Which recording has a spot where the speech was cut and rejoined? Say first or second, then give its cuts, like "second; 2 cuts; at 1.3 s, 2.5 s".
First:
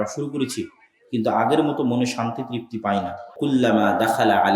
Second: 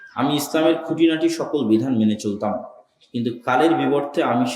first; 1 cut; at 3.3 s